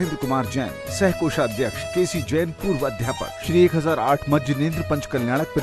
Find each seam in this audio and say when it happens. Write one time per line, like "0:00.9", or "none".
0:01.8
0:03.4